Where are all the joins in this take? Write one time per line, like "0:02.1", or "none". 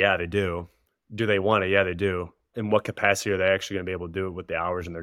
0:02.5